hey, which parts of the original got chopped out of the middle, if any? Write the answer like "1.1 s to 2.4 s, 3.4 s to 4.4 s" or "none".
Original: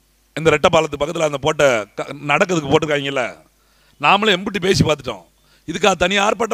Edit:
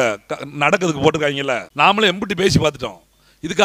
3.3 s to 3.9 s

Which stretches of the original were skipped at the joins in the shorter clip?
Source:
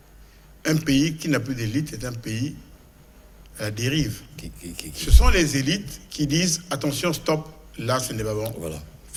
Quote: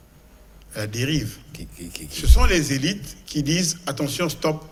none

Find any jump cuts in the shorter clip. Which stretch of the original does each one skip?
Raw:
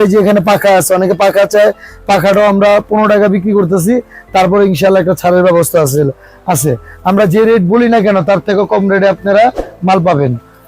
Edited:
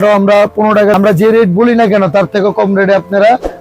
3.3 s to 7.1 s

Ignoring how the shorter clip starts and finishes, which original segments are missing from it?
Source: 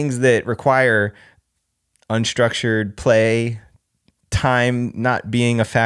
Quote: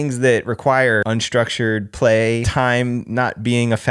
1.0 s to 2.1 s, 3.5 s to 4.3 s

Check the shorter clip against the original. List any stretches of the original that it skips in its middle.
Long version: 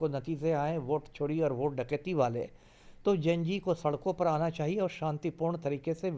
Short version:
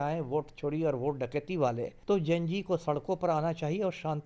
2.5 s to 2.9 s

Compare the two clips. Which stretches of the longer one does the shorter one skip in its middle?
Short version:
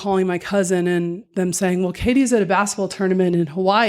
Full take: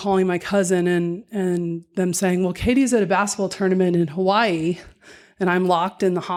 1.2 s to 1.8 s

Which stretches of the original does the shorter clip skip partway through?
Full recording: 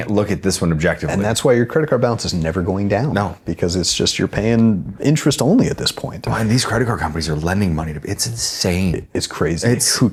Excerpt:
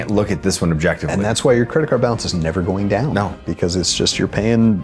none

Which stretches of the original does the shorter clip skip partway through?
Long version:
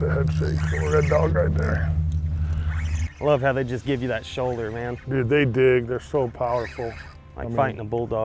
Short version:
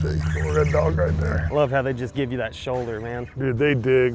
1.8 s to 3.1 s

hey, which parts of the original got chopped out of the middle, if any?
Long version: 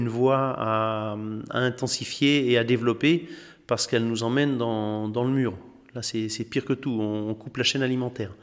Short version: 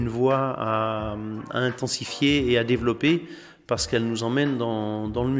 none

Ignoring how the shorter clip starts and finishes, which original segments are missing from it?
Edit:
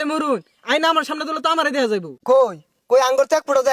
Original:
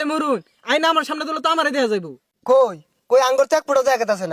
2.1 s to 2.3 s

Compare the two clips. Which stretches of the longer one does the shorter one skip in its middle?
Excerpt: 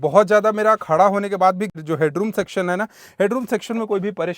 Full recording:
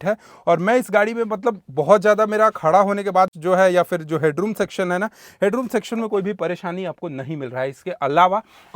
3.4 s to 3.9 s

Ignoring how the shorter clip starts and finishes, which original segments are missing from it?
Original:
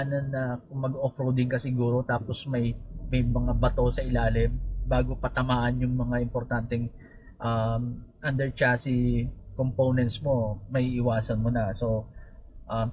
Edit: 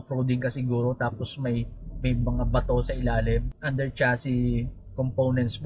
4.6 s to 8.2 s

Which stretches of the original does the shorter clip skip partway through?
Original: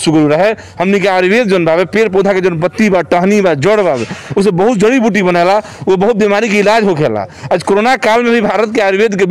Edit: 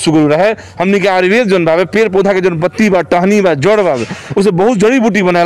none

